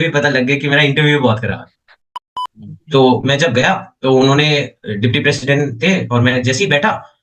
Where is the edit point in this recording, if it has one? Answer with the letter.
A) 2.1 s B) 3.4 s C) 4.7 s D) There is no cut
A